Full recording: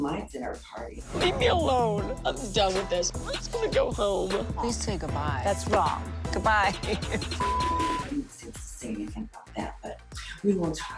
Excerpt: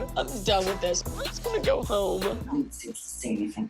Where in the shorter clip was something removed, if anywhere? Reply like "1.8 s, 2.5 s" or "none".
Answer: 2.5 s